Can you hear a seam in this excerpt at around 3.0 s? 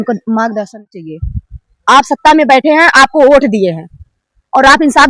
no; 1 cut; at 1.0 s

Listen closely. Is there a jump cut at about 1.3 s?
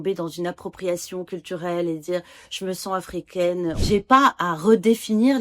no; 1 cut; at 3.8 s

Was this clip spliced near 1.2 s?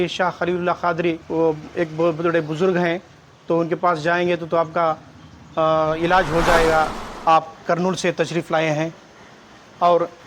yes; 2 cuts; at 1.2 s, 7.0 s

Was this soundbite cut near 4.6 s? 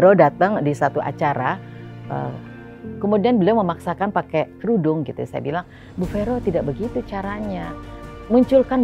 yes; 1 cut; at 4.6 s

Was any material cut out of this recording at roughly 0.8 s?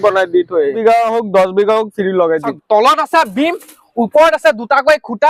yes; 2 cuts; at 0.8 s, 2.5 s

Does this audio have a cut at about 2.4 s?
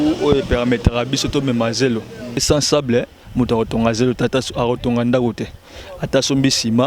yes; 1 cut; at 2.4 s

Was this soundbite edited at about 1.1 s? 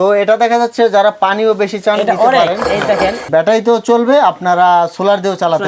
no; 1 cut; at 3.2 s

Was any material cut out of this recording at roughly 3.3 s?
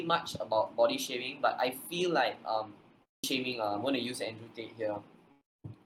yes; 1 cut; at 3.3 s

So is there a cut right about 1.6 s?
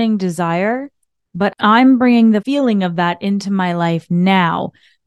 yes; 2 cuts; at 1.6 s, 2.4 s

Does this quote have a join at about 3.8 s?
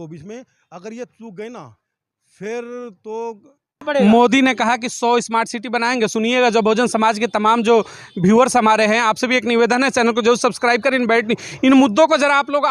yes; 1 cut; at 3.8 s

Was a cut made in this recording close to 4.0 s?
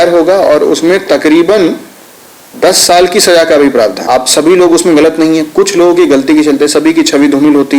yes; 1 cut; at 4.0 s

